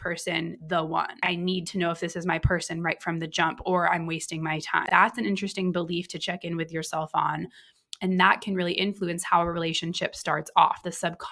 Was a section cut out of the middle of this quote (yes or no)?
yes